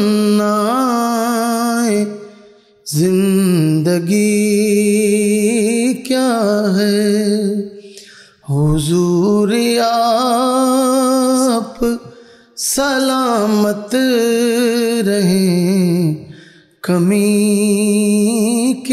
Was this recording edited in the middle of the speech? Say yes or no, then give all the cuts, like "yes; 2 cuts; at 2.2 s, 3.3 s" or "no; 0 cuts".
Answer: no; 0 cuts